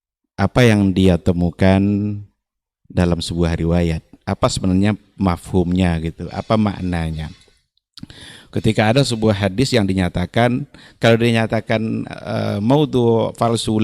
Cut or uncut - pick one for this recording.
uncut